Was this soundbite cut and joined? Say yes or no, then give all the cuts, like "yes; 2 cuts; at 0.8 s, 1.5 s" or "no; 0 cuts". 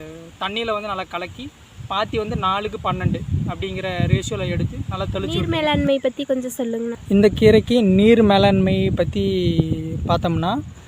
yes; 1 cut; at 5.5 s